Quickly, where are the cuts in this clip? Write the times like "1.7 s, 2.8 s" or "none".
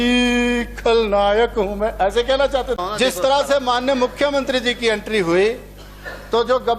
2.8 s